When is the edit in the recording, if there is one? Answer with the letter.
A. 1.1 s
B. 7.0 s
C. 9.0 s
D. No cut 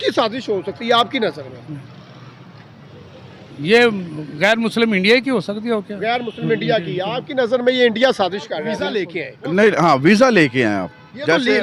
C